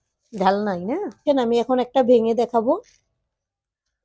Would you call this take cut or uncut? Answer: cut